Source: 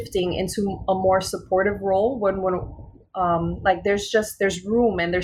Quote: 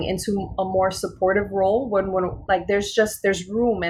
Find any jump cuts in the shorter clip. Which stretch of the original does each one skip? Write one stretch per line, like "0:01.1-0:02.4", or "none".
0:02.7-0:03.6